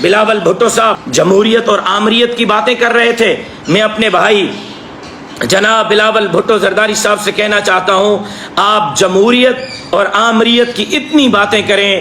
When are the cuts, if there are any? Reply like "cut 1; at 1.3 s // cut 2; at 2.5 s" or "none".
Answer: cut 1; at 1.0 s